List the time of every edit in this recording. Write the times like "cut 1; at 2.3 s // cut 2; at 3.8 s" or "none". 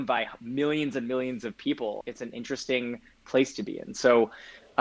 cut 1; at 2.1 s